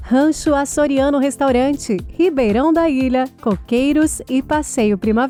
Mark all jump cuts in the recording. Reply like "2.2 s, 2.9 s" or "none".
none